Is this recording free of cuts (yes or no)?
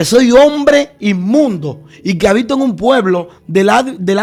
yes